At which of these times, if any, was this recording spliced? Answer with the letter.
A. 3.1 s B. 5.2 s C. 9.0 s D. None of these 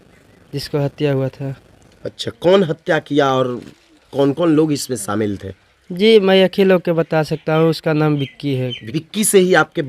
C